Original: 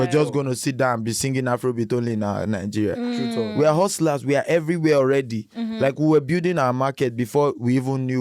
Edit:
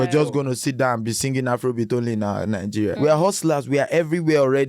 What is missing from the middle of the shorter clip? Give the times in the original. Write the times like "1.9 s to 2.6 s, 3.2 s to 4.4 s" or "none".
3.0 s to 3.5 s